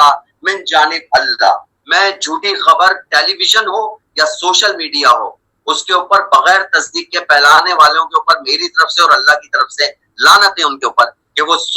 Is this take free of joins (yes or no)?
no